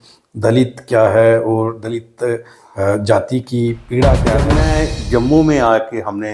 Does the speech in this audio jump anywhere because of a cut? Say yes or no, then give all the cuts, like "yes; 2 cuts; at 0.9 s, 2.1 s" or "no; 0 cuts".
yes; 1 cut; at 4.6 s